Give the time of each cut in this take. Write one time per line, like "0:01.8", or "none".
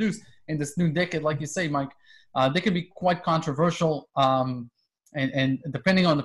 none